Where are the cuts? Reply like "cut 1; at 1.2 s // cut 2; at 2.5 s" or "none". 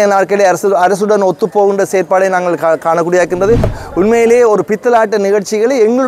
cut 1; at 3.8 s

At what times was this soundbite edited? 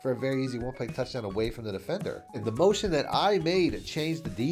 cut 1; at 2.4 s

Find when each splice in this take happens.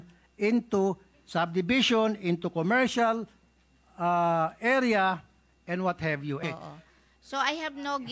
cut 1; at 6.4 s

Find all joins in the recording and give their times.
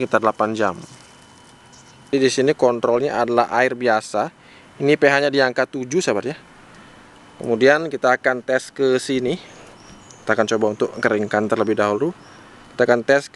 cut 1; at 2.1 s

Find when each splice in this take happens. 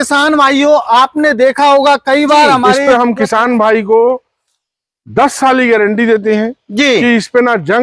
cut 1; at 2.8 s

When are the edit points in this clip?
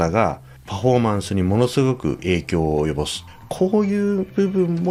none

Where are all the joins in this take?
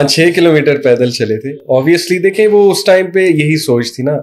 none

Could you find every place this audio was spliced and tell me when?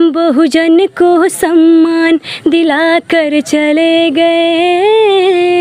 none

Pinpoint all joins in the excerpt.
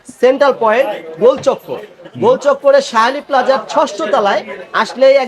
none

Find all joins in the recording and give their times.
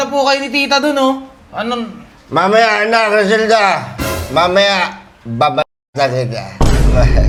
none

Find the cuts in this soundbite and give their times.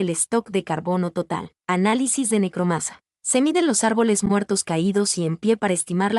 cut 1; at 1.5 s

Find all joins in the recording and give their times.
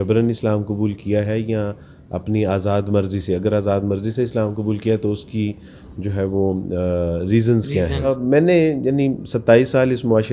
cut 1; at 8.2 s

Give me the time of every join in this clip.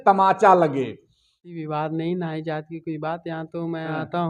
cut 1; at 1.3 s

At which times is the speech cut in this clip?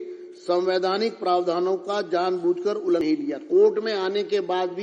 cut 1; at 3.0 s

